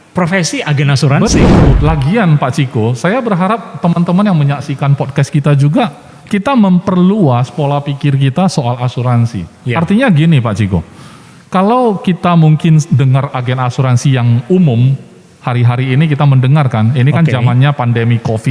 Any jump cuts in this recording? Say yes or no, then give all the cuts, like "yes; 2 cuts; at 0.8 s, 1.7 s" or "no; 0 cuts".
yes; 1 cut; at 1.7 s